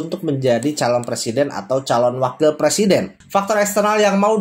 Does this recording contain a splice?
yes; 1 cut; at 3.1 s

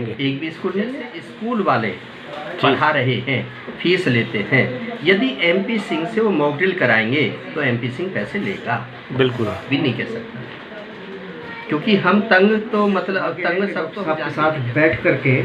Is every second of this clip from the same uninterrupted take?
no; 3 cuts; at 1.2 s, 9.6 s, 13.9 s

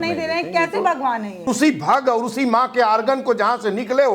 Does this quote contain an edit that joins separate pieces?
yes; 1 cut; at 1.5 s

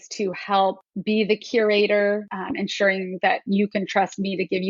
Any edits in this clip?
yes; 2 cuts; at 0.9 s, 2.3 s

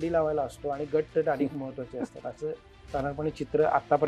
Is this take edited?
no; 0 cuts

